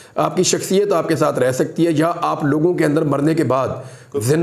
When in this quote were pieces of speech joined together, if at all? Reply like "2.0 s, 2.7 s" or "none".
none